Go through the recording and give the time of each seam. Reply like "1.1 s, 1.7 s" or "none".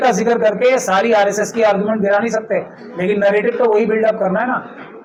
none